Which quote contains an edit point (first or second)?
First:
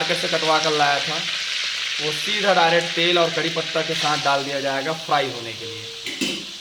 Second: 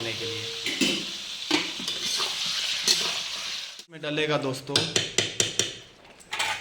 second